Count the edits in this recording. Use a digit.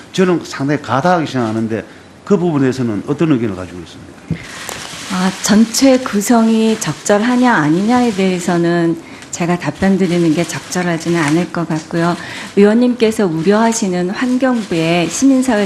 0